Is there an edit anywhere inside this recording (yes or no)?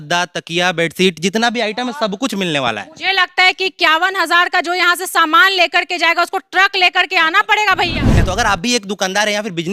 yes